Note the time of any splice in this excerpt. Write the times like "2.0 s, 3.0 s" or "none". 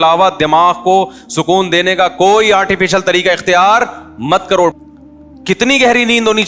4.8 s